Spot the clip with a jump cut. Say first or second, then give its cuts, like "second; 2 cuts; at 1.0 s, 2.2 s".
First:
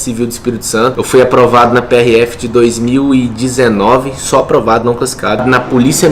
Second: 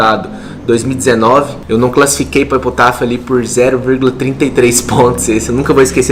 first; 2 cuts; at 1.0 s, 5.4 s